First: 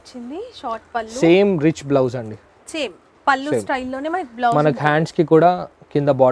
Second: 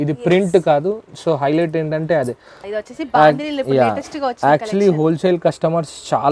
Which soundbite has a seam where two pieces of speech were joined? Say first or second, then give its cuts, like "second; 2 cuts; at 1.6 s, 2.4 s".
second; 1 cut; at 2.6 s